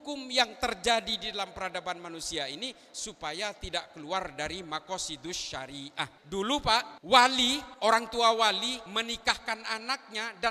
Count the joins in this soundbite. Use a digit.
4